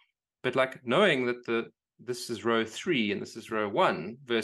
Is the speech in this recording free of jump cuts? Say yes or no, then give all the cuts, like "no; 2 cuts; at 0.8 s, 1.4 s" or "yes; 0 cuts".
yes; 0 cuts